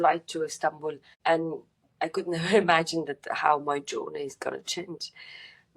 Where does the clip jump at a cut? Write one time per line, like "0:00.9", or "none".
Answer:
0:01.1